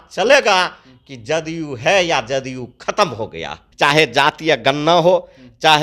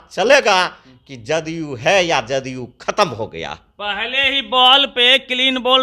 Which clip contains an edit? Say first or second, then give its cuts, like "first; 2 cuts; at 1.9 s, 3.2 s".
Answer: first; 1 cut; at 3.6 s